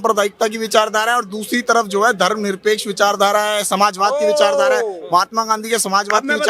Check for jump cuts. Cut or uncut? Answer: uncut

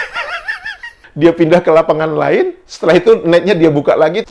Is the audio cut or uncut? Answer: cut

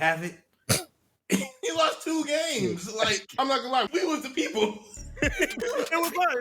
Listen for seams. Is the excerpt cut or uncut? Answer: cut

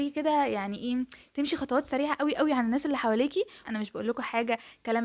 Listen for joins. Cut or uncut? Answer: cut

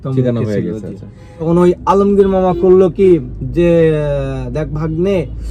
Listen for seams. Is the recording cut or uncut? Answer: cut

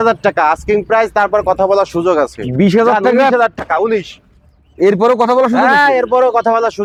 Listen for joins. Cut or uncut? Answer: uncut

